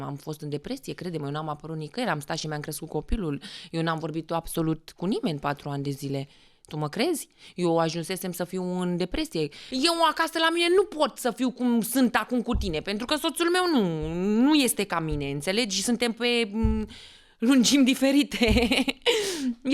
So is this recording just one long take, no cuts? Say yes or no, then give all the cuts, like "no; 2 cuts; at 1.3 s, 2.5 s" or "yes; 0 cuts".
no; 1 cut; at 9.6 s